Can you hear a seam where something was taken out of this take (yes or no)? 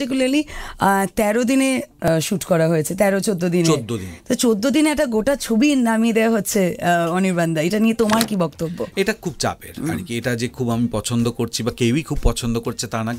no